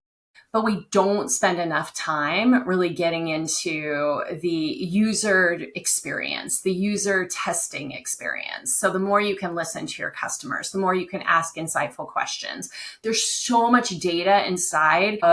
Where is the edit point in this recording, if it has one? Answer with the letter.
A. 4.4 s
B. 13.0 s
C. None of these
B